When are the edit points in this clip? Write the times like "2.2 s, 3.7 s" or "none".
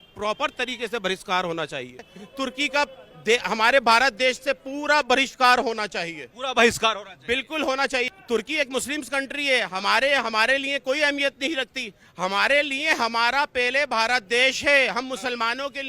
2.2 s, 8.1 s